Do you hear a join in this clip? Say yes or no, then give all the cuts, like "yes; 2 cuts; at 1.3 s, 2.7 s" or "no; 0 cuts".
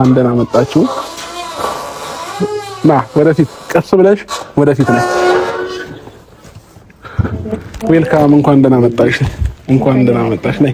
no; 0 cuts